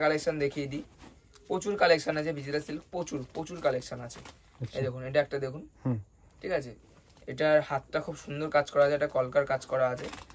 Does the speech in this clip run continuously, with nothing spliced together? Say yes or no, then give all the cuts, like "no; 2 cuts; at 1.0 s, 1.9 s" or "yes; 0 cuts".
yes; 0 cuts